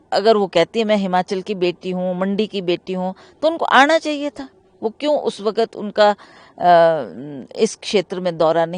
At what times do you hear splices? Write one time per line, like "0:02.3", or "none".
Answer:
none